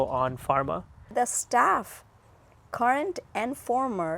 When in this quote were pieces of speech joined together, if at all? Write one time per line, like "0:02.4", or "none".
0:01.1